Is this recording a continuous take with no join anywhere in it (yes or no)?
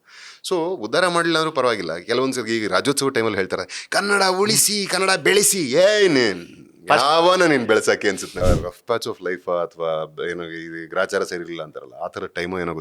no